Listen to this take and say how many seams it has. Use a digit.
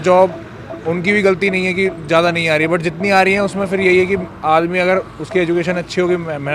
0